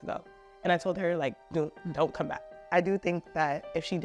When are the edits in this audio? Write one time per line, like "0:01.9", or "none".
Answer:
0:02.4